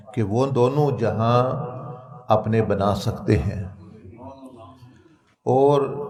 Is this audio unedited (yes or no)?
yes